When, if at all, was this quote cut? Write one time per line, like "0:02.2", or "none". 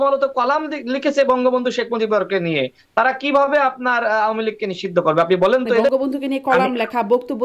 0:05.9